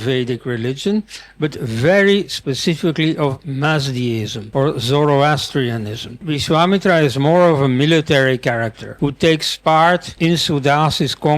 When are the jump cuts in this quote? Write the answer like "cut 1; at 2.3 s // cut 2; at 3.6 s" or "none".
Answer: cut 1; at 4.4 s // cut 2; at 6.3 s // cut 3; at 8.8 s // cut 4; at 10.1 s